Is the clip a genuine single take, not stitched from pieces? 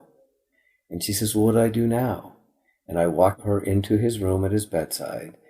no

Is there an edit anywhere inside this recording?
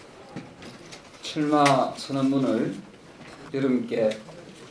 yes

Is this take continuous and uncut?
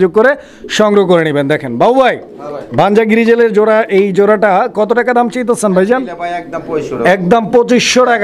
yes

